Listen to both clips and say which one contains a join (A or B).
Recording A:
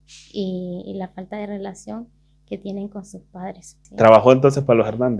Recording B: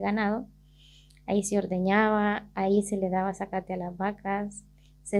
A